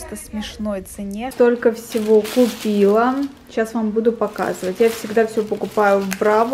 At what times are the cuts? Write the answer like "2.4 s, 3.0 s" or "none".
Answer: 1.3 s